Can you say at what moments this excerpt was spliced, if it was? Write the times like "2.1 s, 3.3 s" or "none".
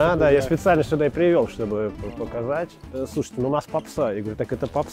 2.8 s